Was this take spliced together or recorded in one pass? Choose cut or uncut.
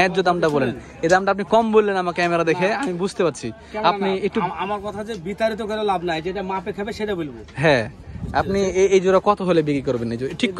uncut